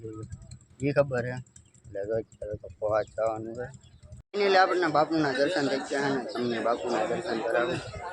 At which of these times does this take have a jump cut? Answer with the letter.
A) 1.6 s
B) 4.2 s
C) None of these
B